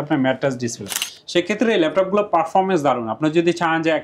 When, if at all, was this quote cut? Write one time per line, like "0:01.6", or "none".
0:01.1

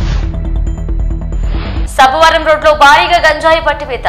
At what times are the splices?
0:01.7

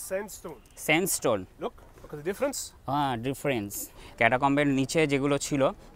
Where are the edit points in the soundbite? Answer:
0:04.1

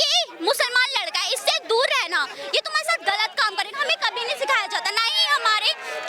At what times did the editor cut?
none

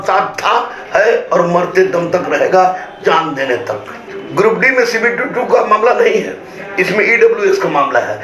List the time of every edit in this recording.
0:04.0

